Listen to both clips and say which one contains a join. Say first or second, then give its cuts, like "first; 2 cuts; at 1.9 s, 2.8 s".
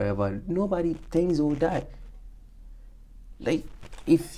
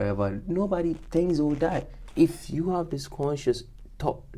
second; 1 cut; at 2.0 s